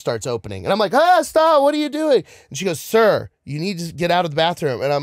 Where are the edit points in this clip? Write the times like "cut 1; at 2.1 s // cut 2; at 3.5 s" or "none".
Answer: none